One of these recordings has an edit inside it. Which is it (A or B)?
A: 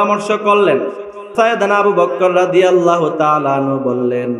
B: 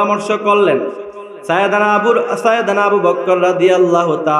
A